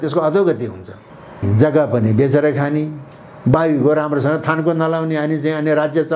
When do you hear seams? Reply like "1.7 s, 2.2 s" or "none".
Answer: 1.4 s